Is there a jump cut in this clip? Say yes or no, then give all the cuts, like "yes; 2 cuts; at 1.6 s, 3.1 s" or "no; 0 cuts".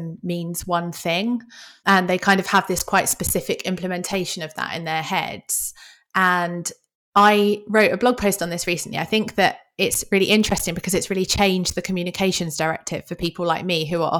yes; 1 cut; at 1.8 s